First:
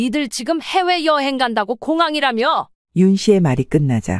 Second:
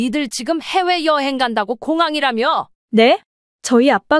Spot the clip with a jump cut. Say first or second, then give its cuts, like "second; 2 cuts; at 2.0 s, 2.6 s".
second; 1 cut; at 2.8 s